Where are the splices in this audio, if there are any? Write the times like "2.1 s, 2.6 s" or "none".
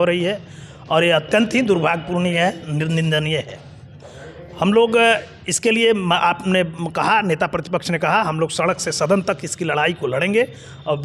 none